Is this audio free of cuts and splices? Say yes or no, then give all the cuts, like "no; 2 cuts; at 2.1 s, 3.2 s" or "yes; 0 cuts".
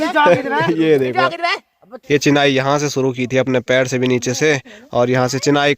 no; 1 cut; at 1.9 s